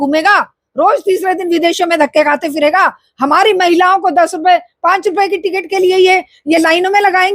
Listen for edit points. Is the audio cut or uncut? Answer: uncut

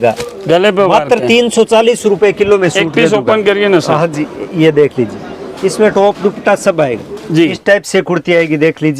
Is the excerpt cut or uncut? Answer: cut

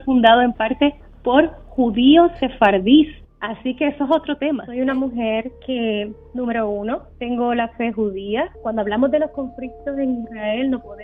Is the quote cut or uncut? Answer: cut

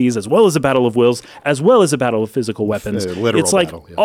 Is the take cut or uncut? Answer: cut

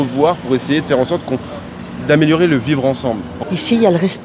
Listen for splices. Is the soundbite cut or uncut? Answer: cut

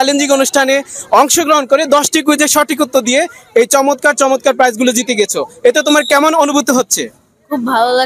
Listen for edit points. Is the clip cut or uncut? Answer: uncut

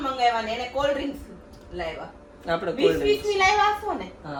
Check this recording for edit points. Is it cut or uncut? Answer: uncut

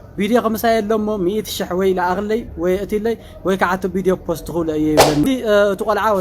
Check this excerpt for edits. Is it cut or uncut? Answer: cut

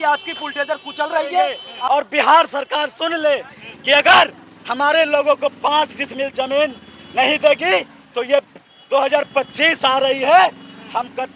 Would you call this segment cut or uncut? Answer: cut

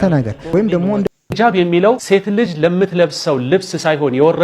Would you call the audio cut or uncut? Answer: cut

